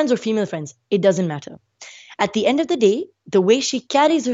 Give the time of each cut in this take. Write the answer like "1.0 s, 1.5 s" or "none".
none